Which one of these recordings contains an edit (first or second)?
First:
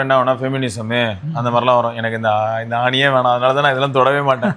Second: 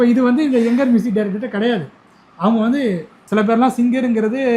second